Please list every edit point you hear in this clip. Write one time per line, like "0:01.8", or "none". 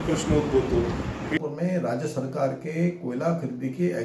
0:01.3